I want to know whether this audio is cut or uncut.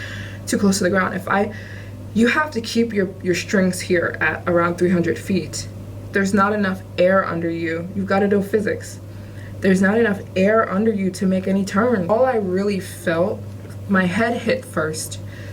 cut